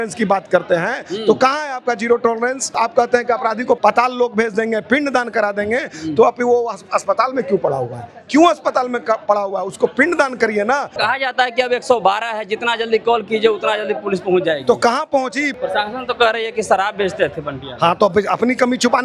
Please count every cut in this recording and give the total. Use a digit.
4